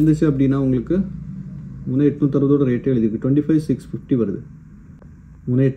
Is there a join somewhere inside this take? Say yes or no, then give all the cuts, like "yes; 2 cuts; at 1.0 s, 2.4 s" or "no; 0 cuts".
no; 0 cuts